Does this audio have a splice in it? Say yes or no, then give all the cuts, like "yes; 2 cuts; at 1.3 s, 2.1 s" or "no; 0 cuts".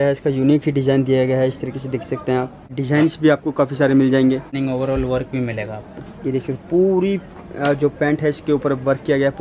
yes; 2 cuts; at 2.7 s, 4.6 s